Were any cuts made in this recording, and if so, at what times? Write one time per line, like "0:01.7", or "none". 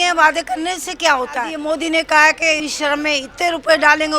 0:01.5
0:02.6